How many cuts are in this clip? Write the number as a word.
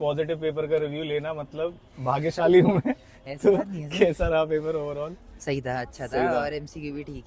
zero